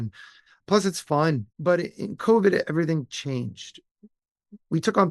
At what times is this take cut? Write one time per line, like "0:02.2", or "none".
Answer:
0:01.5